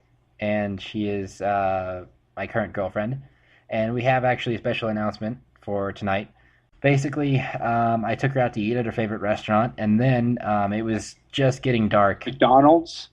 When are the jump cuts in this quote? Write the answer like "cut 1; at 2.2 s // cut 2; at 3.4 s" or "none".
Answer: cut 1; at 1.3 s